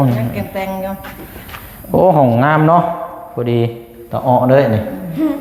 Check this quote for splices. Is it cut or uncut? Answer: uncut